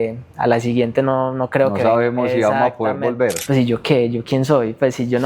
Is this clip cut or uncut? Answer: cut